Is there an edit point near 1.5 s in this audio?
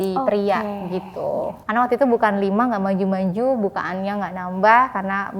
yes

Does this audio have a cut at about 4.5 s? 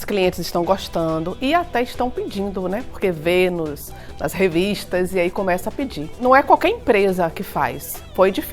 no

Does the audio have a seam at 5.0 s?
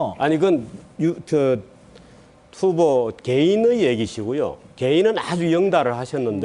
no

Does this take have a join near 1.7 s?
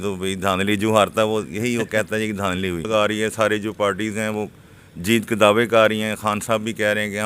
no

